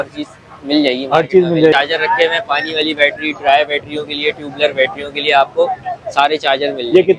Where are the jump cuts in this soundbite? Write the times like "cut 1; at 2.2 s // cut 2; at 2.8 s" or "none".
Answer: cut 1; at 1.7 s